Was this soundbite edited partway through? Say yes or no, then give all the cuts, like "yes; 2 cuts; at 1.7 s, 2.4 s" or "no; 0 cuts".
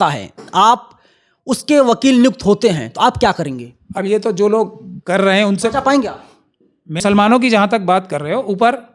yes; 1 cut; at 7.0 s